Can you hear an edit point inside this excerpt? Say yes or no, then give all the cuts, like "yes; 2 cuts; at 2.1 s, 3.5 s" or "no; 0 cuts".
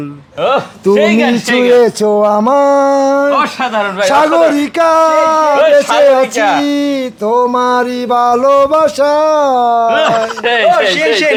no; 0 cuts